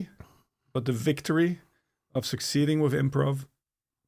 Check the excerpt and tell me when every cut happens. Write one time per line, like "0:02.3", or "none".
none